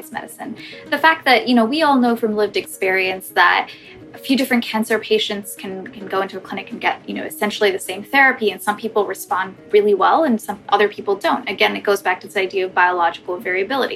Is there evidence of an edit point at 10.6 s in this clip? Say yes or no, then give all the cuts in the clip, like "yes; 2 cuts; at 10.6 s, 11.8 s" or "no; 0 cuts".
no; 0 cuts